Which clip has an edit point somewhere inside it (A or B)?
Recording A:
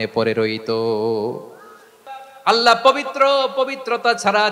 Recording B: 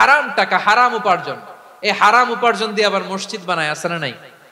A